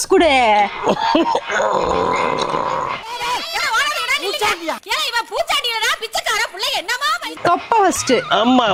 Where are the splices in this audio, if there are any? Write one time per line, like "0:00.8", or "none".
none